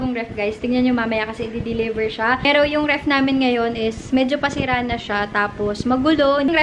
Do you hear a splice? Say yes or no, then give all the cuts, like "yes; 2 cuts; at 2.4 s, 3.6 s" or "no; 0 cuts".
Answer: no; 0 cuts